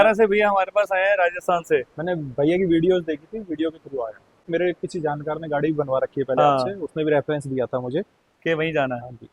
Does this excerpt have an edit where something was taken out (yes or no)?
yes